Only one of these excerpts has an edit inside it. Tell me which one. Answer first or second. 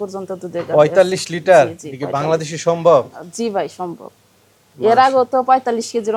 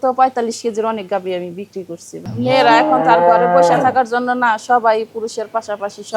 second